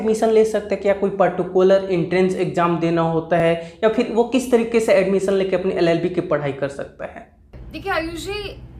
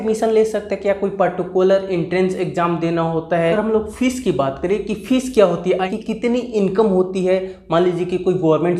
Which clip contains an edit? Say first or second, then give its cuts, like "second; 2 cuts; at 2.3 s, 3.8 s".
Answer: second; 2 cuts; at 3.4 s, 5.8 s